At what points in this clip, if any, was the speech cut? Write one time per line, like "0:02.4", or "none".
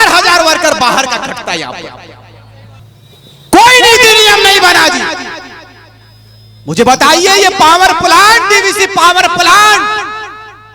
0:02.8